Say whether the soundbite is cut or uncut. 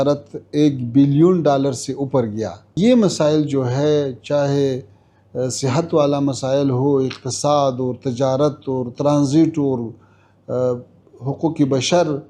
cut